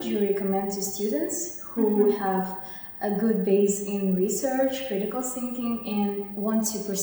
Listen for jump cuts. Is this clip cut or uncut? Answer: uncut